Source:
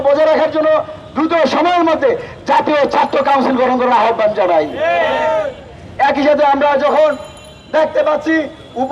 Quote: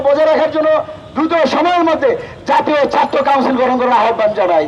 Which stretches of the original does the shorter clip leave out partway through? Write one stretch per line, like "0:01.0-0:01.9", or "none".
none